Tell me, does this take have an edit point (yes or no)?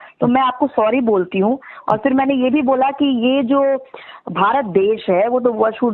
no